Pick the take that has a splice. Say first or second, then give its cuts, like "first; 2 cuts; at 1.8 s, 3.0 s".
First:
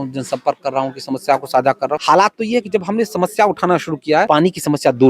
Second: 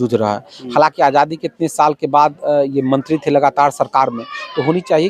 first; 2 cuts; at 2.0 s, 4.3 s